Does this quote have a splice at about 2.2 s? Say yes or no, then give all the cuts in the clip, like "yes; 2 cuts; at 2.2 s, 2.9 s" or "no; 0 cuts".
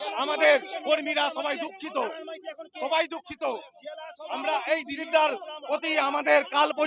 no; 0 cuts